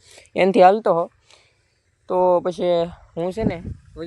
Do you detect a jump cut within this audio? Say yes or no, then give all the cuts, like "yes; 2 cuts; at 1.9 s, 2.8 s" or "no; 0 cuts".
no; 0 cuts